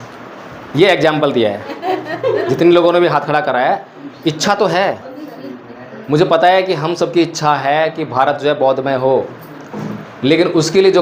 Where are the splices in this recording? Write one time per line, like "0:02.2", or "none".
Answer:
none